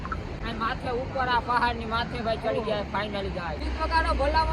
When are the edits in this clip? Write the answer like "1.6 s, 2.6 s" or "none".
3.6 s